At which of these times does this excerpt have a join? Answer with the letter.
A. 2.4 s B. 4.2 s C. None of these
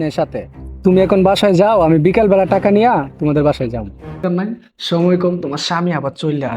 B